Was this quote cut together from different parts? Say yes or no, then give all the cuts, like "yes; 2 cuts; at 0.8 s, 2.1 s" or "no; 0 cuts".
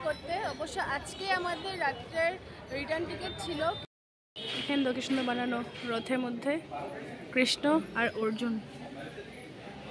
yes; 1 cut; at 3.9 s